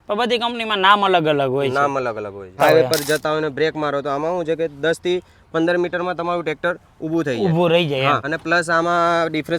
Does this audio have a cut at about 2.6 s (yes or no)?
yes